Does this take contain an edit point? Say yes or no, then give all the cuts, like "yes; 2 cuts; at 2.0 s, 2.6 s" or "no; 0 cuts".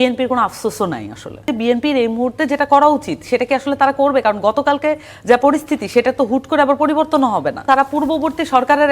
yes; 2 cuts; at 1.5 s, 7.6 s